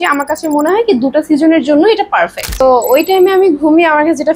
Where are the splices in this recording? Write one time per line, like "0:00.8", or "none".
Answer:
0:02.5